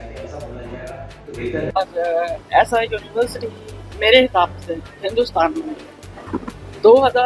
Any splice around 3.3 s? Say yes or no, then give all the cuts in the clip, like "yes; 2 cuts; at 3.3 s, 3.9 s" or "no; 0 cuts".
no; 1 cut; at 1.7 s